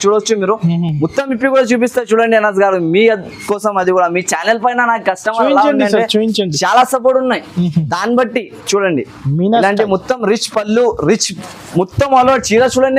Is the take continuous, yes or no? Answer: yes